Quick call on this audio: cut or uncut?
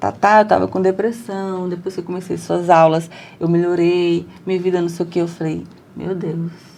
uncut